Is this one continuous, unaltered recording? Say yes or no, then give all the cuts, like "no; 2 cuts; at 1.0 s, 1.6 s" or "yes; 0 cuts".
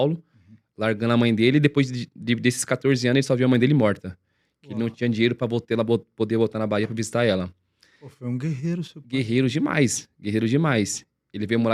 yes; 0 cuts